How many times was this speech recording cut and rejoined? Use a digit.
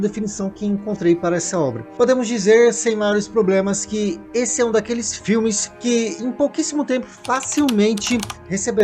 2